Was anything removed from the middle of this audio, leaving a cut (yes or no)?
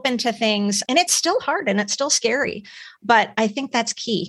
no